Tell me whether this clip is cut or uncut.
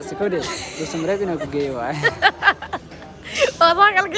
uncut